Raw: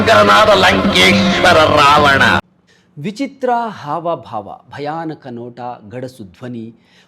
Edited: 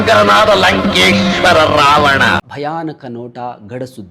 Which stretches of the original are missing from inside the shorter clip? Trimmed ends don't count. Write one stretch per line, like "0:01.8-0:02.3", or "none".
0:02.5-0:04.7